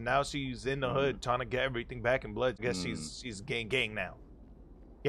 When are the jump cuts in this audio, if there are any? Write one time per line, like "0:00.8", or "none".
0:02.6